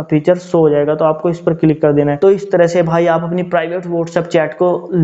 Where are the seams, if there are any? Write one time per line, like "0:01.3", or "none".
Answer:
0:02.2